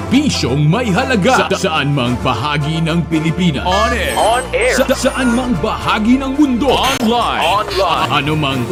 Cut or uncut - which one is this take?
uncut